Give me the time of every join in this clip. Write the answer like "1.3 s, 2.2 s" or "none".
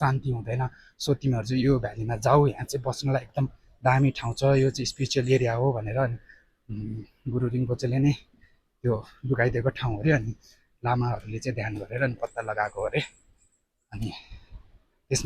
none